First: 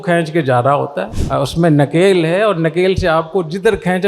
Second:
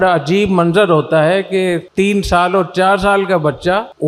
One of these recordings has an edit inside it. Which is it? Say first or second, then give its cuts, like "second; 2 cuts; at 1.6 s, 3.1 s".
first; 1 cut; at 1.1 s